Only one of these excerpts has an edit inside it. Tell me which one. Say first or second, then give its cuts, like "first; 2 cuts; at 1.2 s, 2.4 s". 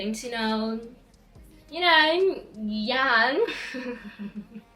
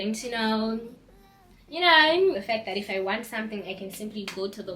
second; 1 cut; at 2.4 s